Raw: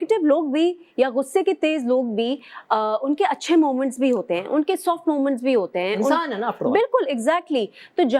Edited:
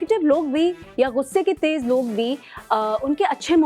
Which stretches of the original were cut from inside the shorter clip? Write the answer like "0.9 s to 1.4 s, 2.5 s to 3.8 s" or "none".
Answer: none